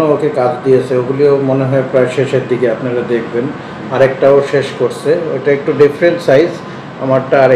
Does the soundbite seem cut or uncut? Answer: uncut